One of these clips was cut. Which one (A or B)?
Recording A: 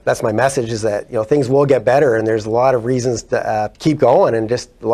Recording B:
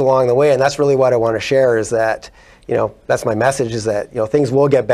A